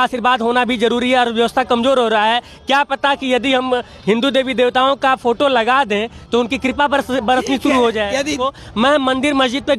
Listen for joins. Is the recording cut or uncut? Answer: cut